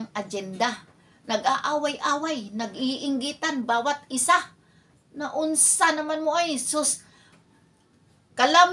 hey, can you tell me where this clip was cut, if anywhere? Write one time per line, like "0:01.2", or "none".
none